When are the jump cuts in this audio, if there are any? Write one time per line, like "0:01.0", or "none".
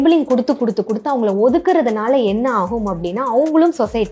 none

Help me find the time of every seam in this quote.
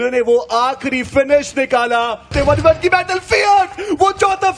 0:02.3

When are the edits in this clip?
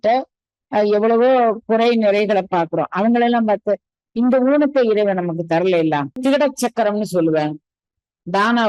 0:06.2

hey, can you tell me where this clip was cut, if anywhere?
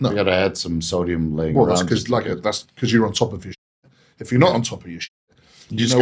none

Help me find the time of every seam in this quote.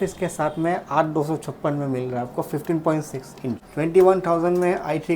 0:03.7

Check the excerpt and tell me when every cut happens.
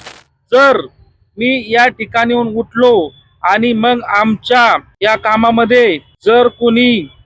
0:04.9
0:06.1

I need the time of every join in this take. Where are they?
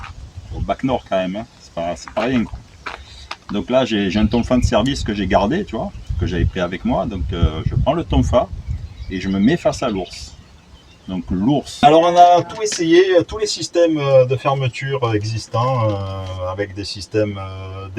0:11.8

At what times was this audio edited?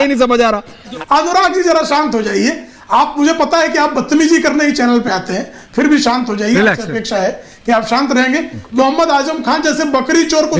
0:01.0
0:08.6

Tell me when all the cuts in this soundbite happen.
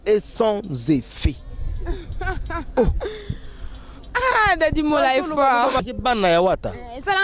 0:05.9

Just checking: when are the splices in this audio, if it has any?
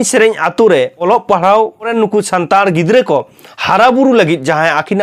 0:01.0
0:01.9

